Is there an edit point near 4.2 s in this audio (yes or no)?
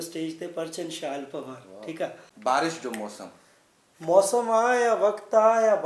no